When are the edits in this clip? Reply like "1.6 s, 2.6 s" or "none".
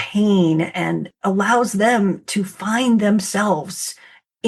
1.1 s